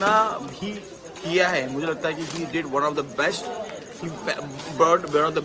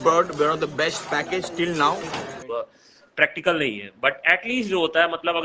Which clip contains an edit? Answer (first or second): second